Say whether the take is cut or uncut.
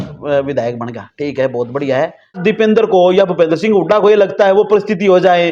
cut